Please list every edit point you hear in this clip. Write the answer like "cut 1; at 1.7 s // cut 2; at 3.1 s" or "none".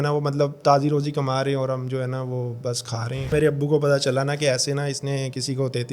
cut 1; at 3.3 s